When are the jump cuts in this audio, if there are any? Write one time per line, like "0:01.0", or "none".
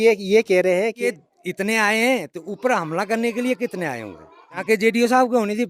0:01.2
0:04.6